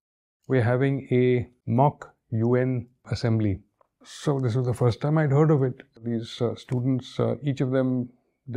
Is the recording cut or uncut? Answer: cut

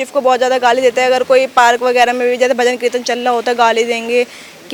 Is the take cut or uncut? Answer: uncut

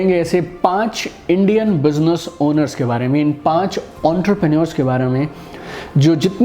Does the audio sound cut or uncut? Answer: uncut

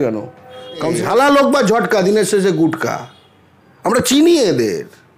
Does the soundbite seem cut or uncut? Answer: cut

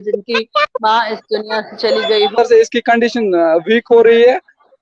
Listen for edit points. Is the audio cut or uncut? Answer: cut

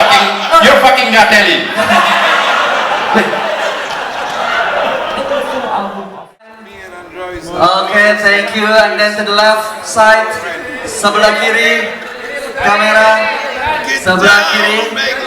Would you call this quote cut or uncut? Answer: cut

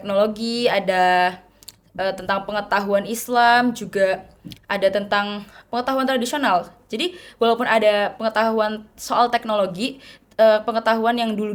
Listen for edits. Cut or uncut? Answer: uncut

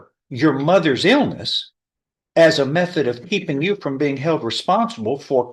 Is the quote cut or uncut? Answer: uncut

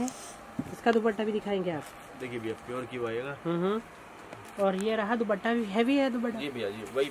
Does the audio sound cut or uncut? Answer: uncut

